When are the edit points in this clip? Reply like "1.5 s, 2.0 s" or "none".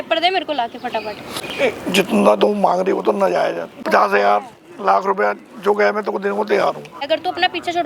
1.5 s, 3.7 s, 7.0 s